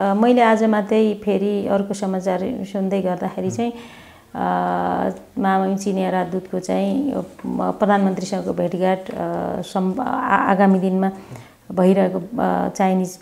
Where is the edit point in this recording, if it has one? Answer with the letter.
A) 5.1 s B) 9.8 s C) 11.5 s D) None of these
D